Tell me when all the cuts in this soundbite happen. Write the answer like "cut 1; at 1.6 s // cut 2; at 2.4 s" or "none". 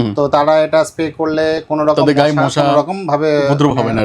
none